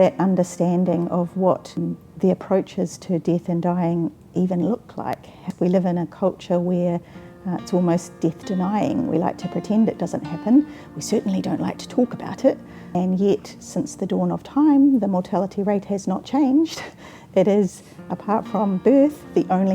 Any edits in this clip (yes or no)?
yes